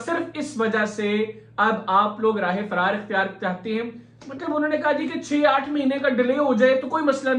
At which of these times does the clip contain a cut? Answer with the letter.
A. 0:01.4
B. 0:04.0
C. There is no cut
C